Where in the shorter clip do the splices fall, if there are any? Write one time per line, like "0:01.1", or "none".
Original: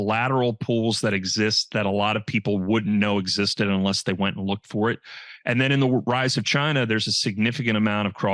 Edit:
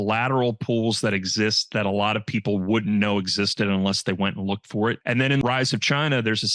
0:05.4